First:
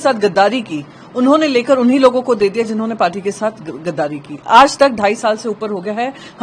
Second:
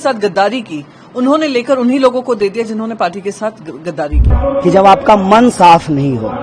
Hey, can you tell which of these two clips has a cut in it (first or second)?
second